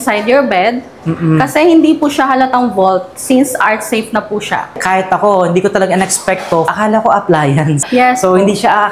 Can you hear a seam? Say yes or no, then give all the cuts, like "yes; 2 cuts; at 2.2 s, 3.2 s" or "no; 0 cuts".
yes; 3 cuts; at 4.8 s, 6.7 s, 7.8 s